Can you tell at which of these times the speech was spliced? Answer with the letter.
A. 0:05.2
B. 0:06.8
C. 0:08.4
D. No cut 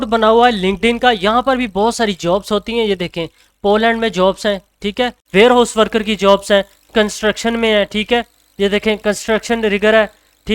A